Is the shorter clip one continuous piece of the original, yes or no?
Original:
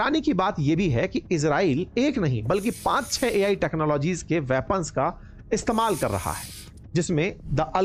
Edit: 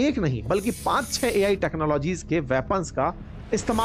yes